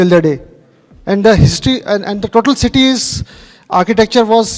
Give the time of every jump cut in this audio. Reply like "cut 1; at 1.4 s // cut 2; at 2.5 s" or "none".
none